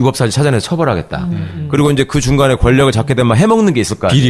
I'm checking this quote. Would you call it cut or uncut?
cut